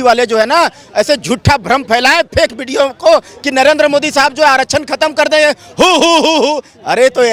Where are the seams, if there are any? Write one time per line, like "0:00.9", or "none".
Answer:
none